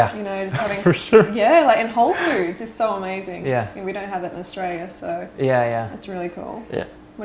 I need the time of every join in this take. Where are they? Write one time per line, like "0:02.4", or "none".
0:05.2